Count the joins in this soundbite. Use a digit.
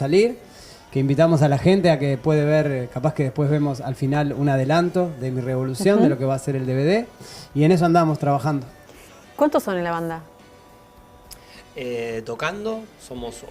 1